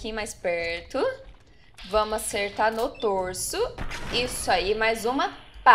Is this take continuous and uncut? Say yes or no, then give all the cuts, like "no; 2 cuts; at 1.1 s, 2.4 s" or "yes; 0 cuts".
yes; 0 cuts